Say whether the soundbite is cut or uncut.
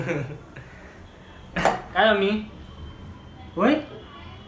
cut